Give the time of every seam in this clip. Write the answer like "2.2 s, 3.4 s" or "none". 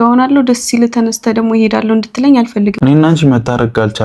2.7 s